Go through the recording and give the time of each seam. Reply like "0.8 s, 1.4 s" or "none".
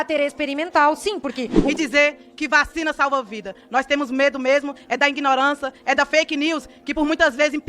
1.6 s